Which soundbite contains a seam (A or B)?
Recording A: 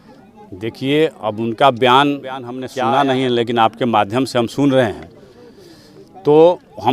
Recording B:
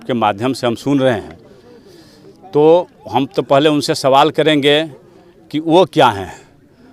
A